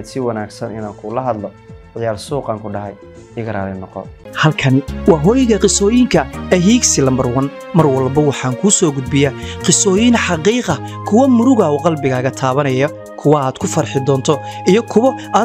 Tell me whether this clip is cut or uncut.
cut